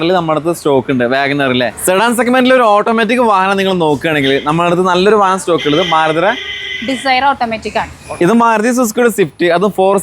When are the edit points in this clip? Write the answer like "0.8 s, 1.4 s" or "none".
1.8 s, 8.0 s